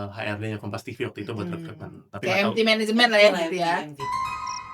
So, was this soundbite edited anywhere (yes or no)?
no